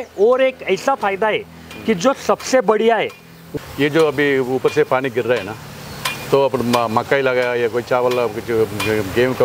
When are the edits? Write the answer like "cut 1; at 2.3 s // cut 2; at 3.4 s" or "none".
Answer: cut 1; at 3.4 s